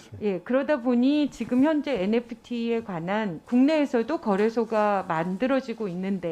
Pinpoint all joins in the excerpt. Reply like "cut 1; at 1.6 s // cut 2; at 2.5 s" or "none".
cut 1; at 3.4 s